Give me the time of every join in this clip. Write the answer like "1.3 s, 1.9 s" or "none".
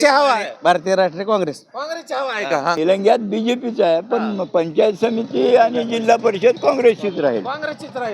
2.8 s